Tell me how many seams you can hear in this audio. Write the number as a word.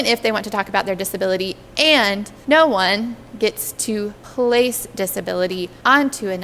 zero